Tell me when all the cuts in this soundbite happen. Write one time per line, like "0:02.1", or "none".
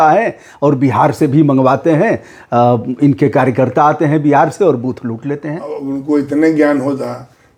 none